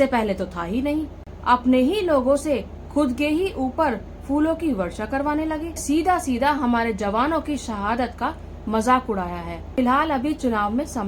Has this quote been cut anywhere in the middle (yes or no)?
yes